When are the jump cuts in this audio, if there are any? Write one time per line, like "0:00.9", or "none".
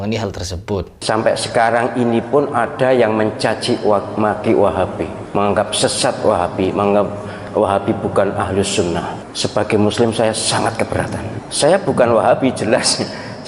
0:00.9